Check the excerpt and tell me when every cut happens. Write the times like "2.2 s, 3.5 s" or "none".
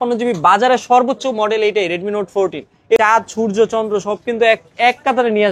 3.0 s